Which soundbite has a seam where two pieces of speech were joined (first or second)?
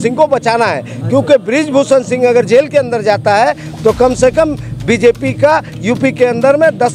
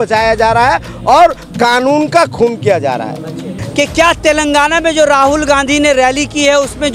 second